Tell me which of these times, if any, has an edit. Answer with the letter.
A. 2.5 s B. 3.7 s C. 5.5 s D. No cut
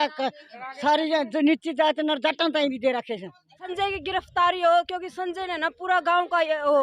B